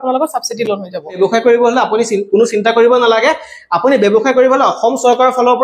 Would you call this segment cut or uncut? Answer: cut